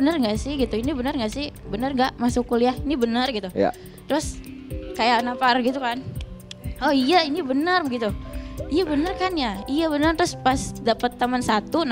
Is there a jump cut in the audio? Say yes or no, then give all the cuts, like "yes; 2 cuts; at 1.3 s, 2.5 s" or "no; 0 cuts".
no; 0 cuts